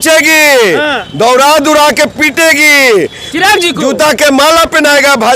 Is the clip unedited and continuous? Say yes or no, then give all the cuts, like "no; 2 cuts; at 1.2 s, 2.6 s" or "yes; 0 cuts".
yes; 0 cuts